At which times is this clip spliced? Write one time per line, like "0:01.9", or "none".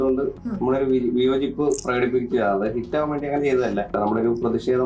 0:04.0